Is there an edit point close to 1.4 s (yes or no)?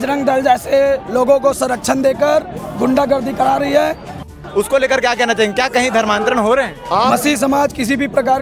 no